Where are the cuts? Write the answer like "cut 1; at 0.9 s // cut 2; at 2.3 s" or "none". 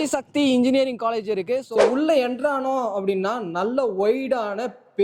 cut 1; at 1.7 s